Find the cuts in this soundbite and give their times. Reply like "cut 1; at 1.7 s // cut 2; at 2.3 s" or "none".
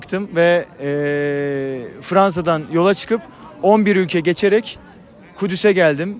none